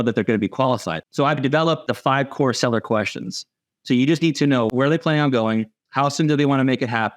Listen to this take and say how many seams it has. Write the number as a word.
three